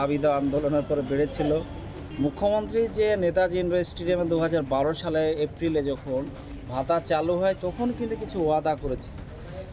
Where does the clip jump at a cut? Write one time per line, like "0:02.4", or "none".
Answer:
none